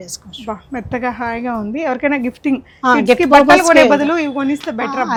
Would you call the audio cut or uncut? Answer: uncut